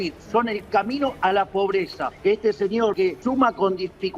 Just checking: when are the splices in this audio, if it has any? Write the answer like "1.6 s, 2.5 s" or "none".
2.1 s, 3.0 s